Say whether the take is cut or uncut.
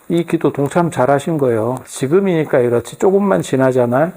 cut